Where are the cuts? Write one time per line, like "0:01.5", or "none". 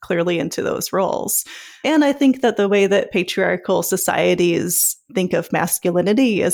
0:01.8
0:05.1